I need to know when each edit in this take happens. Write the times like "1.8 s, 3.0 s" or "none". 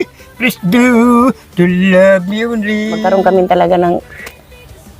3.0 s